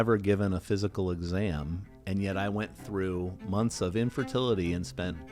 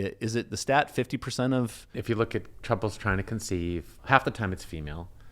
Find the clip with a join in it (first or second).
second